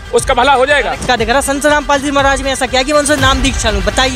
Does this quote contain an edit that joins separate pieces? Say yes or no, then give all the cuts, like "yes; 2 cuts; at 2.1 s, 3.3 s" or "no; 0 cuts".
yes; 1 cut; at 1.0 s